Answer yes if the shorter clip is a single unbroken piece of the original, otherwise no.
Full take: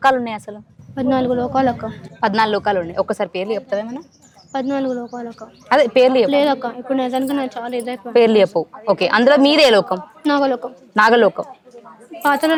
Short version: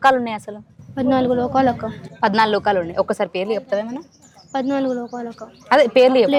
yes